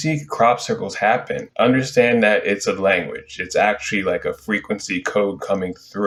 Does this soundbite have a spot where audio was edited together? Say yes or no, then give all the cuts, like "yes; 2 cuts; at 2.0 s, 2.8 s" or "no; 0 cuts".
no; 0 cuts